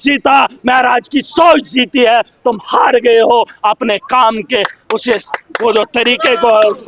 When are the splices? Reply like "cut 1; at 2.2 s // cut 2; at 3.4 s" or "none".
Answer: none